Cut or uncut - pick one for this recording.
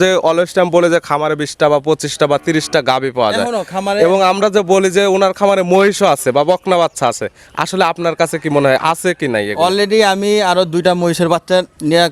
uncut